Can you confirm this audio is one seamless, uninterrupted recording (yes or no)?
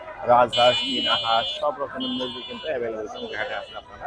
yes